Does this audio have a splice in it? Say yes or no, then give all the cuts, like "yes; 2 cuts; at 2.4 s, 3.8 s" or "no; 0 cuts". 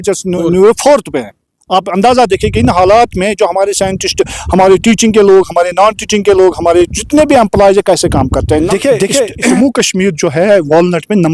yes; 2 cuts; at 8.4 s, 9.6 s